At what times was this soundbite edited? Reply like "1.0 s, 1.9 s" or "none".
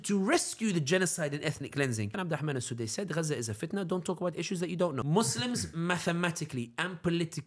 2.2 s, 5.0 s

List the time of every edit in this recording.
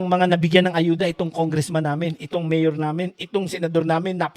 none

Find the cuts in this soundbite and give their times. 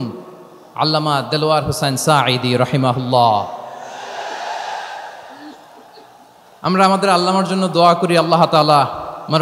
none

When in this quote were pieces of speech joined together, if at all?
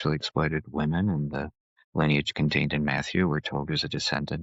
none

